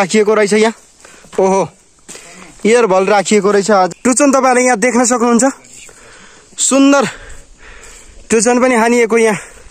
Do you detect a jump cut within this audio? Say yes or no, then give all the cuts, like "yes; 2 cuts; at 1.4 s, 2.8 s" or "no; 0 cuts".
yes; 1 cut; at 3.9 s